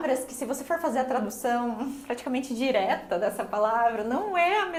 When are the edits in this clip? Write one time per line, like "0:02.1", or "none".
none